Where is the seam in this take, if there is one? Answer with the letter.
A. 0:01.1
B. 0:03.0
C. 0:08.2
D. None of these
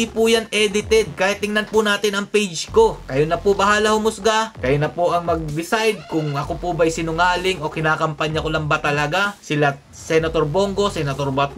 B